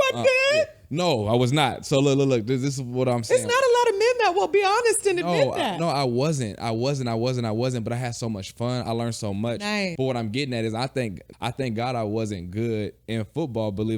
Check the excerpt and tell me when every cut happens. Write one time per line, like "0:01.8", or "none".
0:09.9
0:11.3